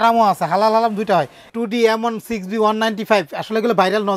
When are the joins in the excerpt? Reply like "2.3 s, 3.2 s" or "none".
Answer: 1.5 s